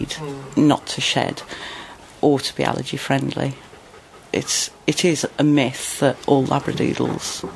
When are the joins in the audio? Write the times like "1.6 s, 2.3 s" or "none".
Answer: 2.0 s, 3.7 s